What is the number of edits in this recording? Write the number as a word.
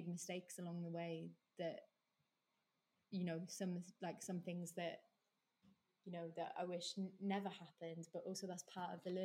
zero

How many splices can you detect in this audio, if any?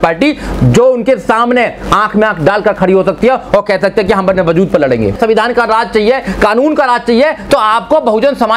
one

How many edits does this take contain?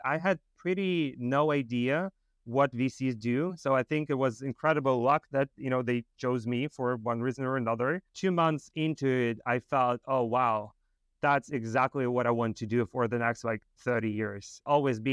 zero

